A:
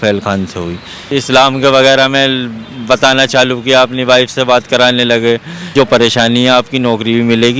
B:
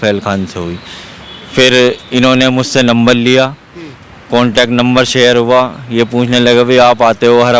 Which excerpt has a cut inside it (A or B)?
A